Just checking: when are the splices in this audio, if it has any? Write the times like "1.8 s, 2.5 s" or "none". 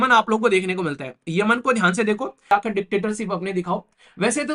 2.5 s